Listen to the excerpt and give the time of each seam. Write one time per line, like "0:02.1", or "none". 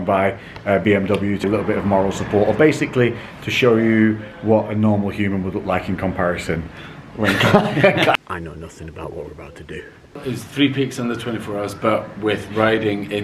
0:01.4
0:08.2
0:10.2